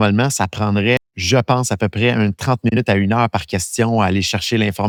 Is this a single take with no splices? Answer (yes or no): yes